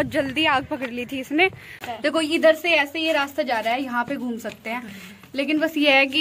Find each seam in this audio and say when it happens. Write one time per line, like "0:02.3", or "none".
0:01.8